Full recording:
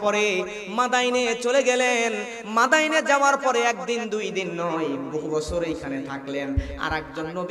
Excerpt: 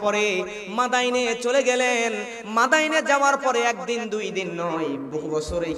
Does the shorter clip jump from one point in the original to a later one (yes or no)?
no